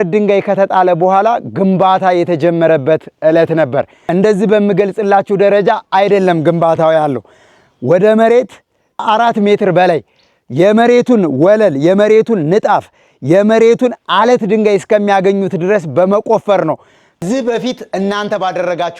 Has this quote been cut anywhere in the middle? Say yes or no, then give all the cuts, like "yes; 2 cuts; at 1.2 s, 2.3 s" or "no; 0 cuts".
yes; 1 cut; at 17.2 s